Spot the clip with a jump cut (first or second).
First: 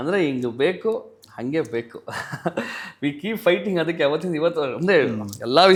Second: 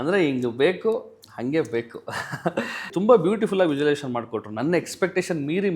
second